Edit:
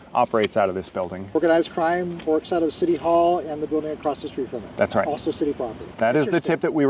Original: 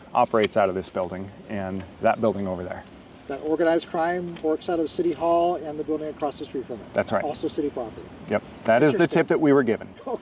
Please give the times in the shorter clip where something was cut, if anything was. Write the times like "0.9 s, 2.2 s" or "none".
1.3 s, 5.9 s